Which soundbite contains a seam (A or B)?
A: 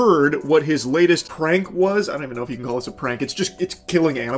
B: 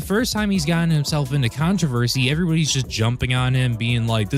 A